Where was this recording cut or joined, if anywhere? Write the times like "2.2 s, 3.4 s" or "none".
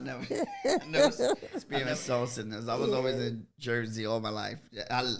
none